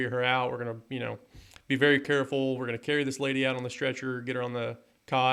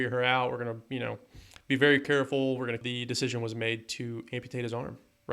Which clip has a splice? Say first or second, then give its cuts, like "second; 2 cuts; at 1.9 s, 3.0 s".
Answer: second; 1 cut; at 2.8 s